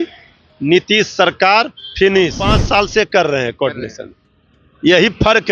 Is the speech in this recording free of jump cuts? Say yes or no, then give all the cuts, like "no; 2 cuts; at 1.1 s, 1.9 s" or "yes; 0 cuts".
no; 1 cut; at 2.5 s